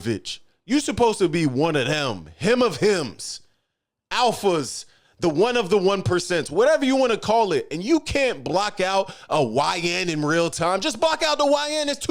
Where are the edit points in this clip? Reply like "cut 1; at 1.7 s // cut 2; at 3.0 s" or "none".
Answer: none

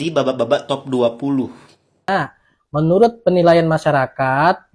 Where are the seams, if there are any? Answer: cut 1; at 2.0 s

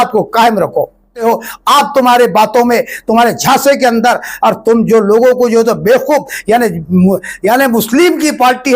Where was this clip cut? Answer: cut 1; at 1.2 s

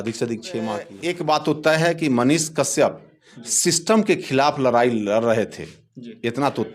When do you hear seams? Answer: cut 1; at 1.0 s

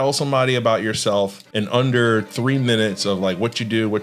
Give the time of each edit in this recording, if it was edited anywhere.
cut 1; at 1.4 s

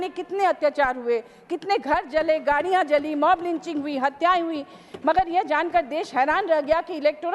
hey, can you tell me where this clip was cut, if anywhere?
none

